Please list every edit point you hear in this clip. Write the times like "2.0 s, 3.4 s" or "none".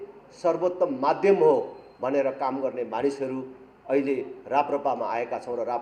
none